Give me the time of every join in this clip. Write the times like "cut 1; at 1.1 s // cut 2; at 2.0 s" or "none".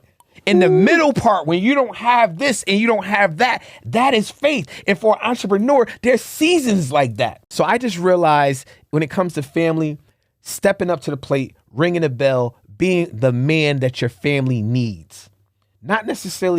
cut 1; at 7.4 s